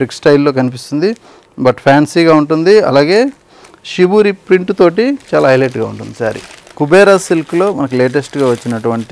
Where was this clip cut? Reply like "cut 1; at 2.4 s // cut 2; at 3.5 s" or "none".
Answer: cut 1; at 6.7 s